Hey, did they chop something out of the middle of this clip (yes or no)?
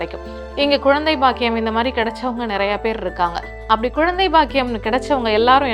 no